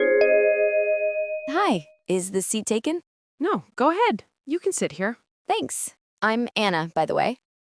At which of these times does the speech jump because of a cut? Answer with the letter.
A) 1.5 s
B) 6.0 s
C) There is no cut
A